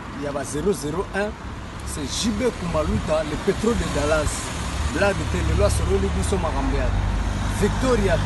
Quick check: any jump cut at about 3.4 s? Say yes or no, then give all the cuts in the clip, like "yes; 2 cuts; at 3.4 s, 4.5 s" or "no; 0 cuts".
no; 0 cuts